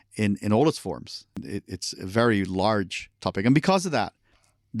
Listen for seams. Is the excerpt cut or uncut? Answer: cut